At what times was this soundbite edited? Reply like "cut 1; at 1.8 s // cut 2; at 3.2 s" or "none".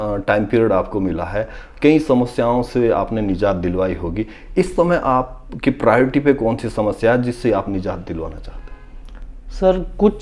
none